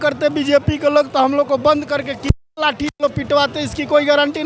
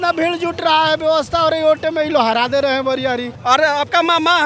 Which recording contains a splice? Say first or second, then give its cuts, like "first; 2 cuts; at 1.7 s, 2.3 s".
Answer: second; 1 cut; at 3.3 s